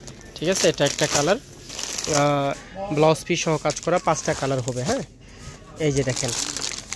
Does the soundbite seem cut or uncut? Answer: cut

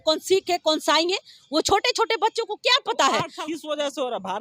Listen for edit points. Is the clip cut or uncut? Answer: cut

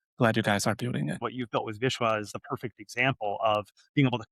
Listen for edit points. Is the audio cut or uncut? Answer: cut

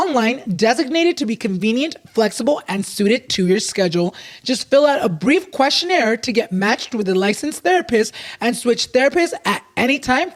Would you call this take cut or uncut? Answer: uncut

